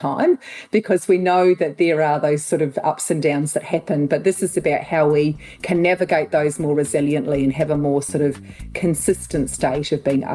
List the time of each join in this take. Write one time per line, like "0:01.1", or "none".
none